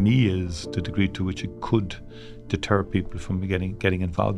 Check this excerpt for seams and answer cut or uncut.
uncut